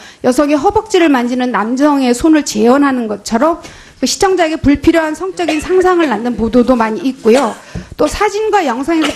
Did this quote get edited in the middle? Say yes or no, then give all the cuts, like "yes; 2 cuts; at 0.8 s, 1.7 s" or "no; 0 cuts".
yes; 1 cut; at 6.4 s